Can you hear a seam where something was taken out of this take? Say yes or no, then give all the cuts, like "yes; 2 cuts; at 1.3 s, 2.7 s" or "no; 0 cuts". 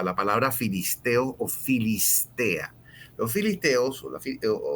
no; 0 cuts